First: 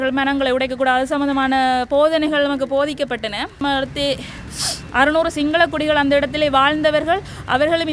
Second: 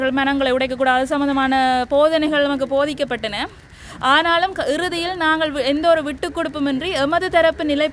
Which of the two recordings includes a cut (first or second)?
first